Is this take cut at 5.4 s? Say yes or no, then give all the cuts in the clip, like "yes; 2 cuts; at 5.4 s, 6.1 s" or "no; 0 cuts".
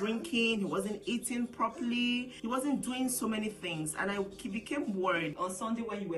yes; 2 cuts; at 2.3 s, 5.4 s